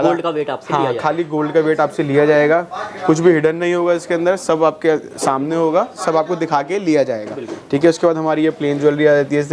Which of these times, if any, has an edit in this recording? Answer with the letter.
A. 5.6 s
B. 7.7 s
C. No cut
C